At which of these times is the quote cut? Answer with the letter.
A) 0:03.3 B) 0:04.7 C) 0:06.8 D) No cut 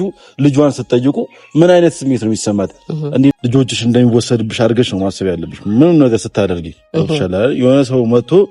A